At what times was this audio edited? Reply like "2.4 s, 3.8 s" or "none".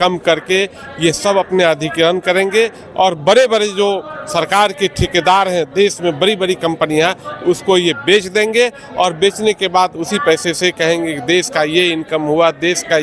none